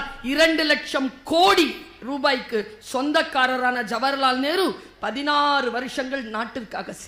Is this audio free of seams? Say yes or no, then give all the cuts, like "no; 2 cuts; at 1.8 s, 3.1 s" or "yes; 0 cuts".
yes; 0 cuts